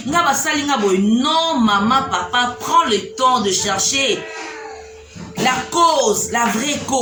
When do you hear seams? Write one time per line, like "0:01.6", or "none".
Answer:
none